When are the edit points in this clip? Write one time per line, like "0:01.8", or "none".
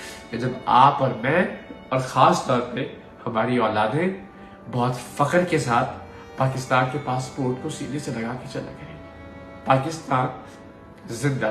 none